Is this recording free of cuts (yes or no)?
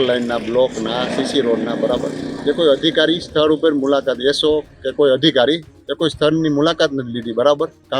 yes